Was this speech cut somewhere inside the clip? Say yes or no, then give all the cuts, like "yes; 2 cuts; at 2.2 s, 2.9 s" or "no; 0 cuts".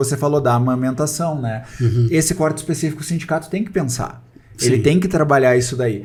no; 0 cuts